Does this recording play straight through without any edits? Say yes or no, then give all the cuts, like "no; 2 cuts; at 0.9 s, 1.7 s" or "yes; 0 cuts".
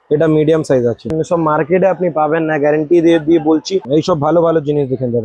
no; 2 cuts; at 1.2 s, 3.8 s